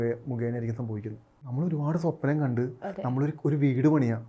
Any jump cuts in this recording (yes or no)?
yes